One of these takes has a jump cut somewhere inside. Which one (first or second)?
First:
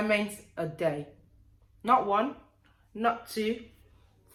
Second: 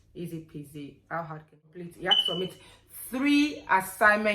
second